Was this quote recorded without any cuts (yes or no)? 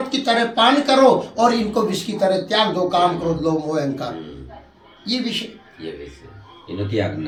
yes